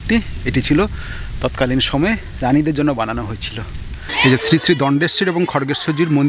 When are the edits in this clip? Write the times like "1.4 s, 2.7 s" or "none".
4.0 s